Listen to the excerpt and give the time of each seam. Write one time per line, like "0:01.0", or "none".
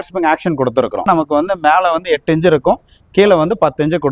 0:01.1